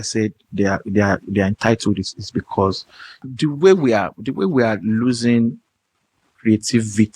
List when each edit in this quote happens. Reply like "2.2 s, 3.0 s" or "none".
3.2 s